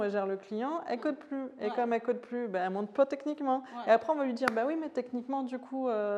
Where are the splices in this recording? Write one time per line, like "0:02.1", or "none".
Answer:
none